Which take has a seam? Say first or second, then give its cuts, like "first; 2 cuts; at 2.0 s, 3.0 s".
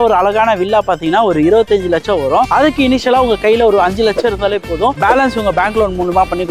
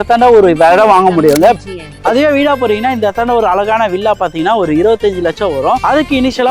second; 1 cut; at 1.6 s